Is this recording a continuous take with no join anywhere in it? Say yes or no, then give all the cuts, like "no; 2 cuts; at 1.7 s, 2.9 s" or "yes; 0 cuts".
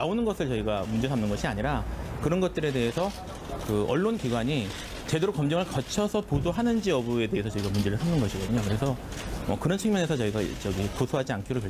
no; 1 cut; at 1.2 s